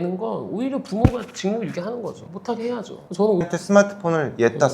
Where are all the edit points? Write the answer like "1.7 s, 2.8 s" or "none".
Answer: 3.4 s